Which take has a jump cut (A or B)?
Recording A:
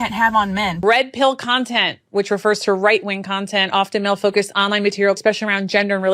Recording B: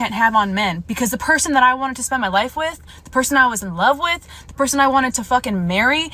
A